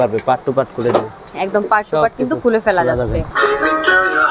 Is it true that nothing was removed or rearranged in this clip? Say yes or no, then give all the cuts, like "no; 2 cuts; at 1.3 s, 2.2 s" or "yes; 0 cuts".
no; 2 cuts; at 1.3 s, 3.3 s